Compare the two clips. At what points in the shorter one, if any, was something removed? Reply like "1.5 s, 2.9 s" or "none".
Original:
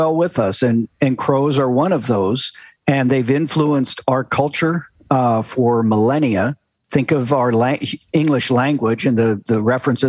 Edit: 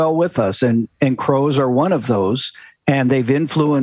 none